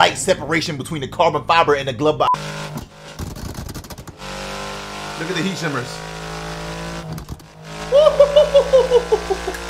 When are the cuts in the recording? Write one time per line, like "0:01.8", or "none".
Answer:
0:02.3